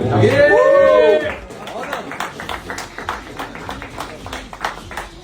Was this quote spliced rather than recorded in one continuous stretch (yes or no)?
yes